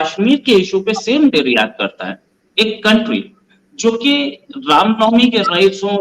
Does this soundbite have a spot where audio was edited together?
no; 0 cuts

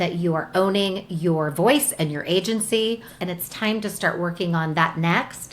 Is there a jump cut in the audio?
yes; 1 cut; at 3.1 s

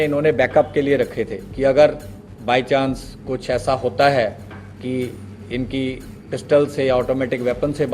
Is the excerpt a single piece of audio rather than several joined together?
yes; 0 cuts

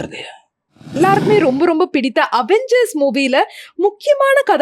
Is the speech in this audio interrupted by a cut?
yes; 1 cut; at 1.0 s

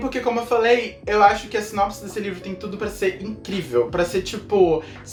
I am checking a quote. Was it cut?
no; 0 cuts

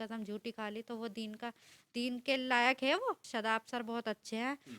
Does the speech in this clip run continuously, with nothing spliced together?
no; 1 cut; at 3.2 s

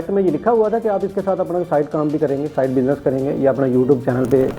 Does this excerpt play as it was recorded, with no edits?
yes; 0 cuts

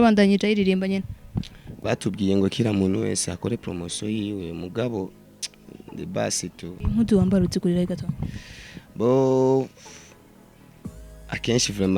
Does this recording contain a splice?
yes; 1 cut; at 6.8 s

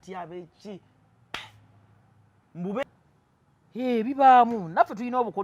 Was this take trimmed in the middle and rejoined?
yes; 1 cut; at 2.8 s

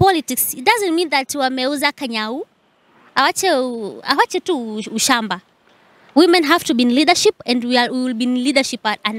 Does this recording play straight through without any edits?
yes; 0 cuts

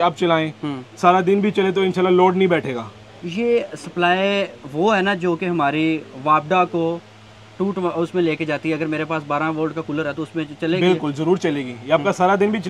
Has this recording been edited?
no; 0 cuts

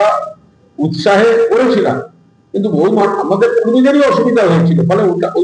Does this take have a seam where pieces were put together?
no; 0 cuts

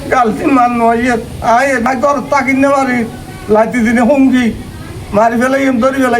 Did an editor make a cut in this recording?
yes; 1 cut; at 1.9 s

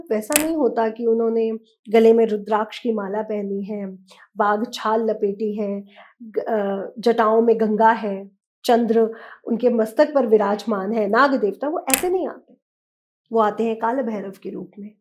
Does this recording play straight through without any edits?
yes; 0 cuts

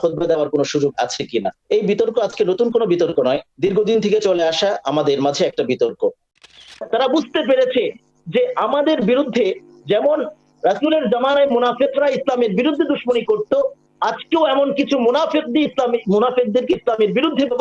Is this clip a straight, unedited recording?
no; 3 cuts; at 1.6 s, 3.5 s, 6.5 s

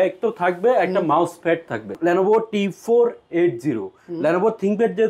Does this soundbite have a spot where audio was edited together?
yes; 1 cut; at 1.9 s

